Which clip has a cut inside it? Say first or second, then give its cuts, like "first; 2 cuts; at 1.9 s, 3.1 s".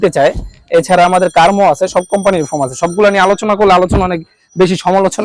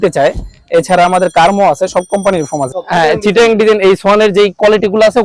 second; 1 cut; at 2.7 s